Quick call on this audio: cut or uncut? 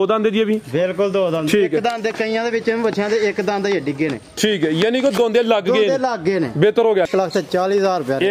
cut